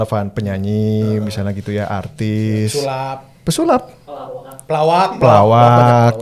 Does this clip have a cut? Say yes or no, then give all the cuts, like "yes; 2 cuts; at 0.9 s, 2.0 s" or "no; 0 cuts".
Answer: no; 0 cuts